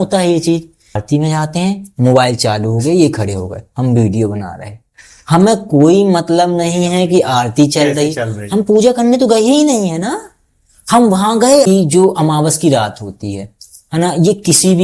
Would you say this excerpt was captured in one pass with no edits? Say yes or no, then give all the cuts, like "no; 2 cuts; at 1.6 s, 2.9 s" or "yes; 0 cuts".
no; 2 cuts; at 1.0 s, 11.7 s